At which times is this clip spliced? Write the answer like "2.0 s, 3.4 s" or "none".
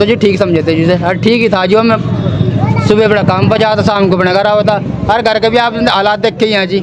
none